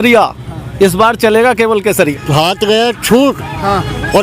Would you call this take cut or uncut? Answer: cut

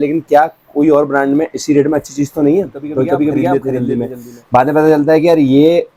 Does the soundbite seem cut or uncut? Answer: uncut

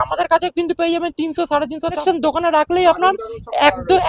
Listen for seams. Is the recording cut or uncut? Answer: cut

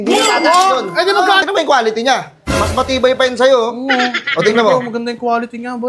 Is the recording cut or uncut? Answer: cut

